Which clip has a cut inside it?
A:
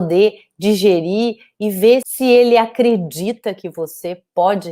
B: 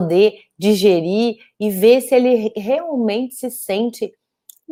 A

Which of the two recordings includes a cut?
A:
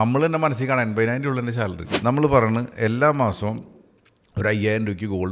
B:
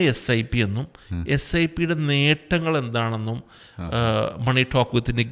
A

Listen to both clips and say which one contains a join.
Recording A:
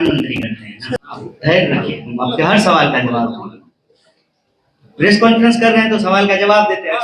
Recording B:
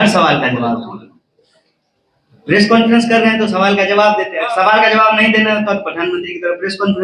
A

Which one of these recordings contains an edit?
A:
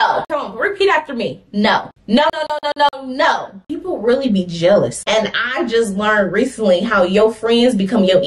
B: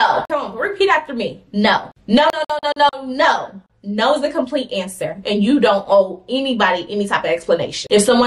A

